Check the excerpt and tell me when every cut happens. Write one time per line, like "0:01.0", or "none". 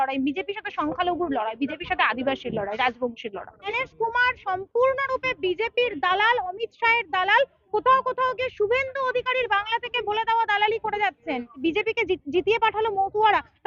0:03.8
0:11.5